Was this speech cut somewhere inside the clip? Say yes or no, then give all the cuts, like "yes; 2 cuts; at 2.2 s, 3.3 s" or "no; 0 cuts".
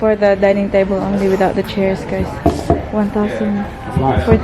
no; 0 cuts